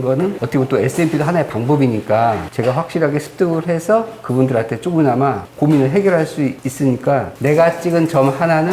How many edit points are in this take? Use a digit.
1